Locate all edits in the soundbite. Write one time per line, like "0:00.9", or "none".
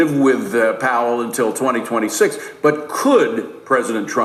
none